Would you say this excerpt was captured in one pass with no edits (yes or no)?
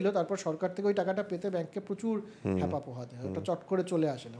yes